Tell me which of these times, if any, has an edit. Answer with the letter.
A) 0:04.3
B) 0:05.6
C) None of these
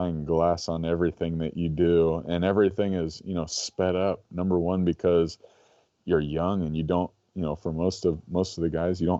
C